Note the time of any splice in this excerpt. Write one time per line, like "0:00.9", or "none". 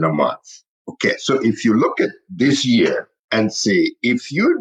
0:03.2